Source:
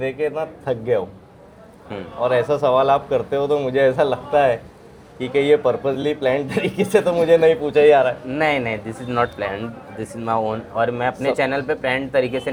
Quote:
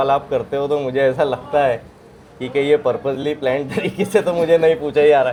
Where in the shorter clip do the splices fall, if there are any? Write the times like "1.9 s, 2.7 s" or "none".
none